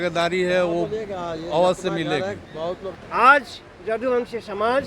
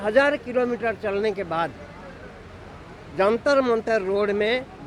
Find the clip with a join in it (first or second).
first